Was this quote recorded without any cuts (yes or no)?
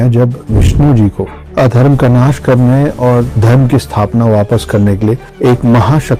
no